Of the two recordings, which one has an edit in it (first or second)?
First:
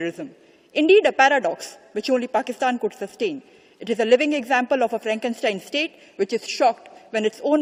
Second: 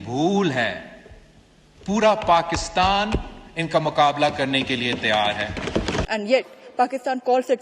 second